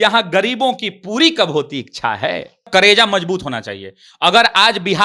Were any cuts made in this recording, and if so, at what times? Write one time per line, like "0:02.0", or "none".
0:02.7